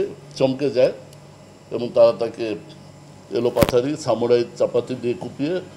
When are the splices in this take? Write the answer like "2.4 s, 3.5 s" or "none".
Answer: none